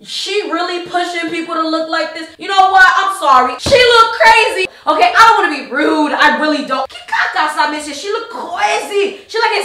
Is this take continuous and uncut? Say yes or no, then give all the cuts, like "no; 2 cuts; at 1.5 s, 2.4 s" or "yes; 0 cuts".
no; 2 cuts; at 3.6 s, 4.7 s